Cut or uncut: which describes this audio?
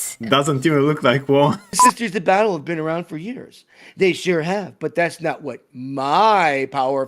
cut